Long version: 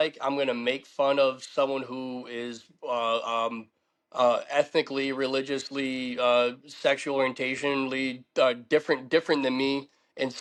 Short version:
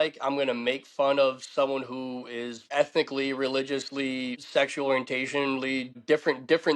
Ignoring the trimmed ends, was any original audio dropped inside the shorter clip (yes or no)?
yes